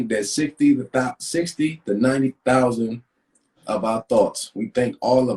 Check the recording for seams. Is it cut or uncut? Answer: cut